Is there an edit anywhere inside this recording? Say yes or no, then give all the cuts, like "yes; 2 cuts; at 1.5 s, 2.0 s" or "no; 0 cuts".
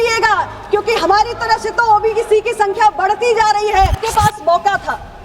yes; 1 cut; at 4.0 s